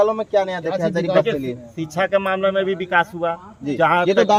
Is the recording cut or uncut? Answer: uncut